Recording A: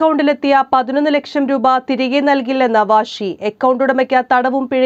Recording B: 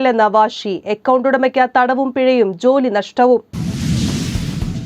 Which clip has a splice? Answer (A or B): B